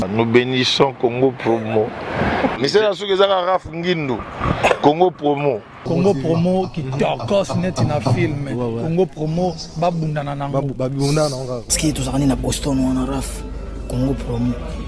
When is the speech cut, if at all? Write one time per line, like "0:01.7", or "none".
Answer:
none